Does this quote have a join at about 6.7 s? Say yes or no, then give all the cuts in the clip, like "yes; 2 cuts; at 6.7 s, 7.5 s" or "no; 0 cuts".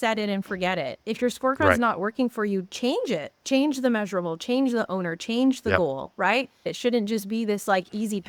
yes; 1 cut; at 6.7 s